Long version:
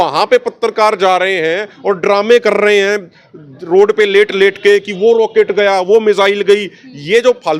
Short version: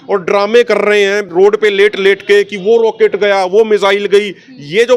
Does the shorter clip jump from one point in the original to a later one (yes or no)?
yes